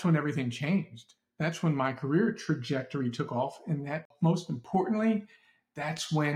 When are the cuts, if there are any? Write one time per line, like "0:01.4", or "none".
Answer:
0:04.1